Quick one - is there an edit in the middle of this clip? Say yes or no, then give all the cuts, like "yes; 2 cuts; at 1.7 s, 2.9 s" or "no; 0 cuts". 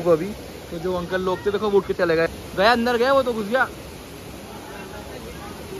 yes; 1 cut; at 2.3 s